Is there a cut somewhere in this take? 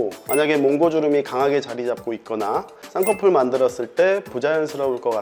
no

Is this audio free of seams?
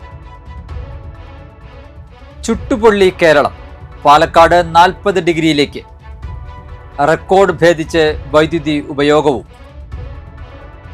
no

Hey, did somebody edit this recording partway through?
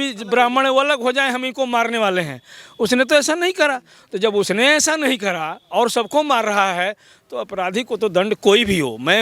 no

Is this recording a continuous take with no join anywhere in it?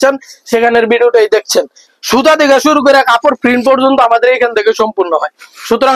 no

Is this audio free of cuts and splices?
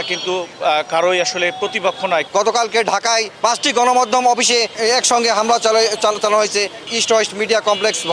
no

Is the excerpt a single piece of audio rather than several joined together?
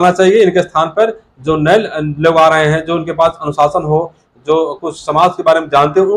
yes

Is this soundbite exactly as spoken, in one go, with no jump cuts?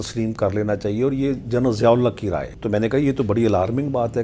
no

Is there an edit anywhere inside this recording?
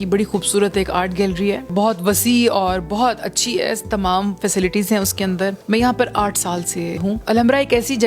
yes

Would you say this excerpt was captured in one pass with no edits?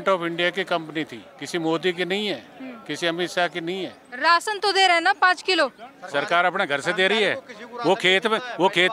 no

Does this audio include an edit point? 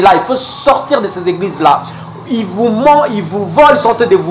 no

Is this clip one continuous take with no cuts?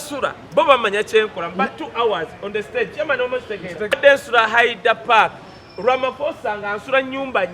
no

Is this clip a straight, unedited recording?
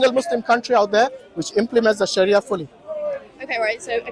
yes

